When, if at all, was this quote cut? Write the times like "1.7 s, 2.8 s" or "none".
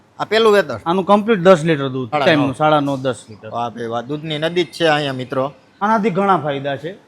2.2 s, 5.6 s